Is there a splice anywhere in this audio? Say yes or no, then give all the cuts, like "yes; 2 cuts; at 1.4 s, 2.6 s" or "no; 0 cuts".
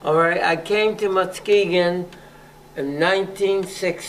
no; 0 cuts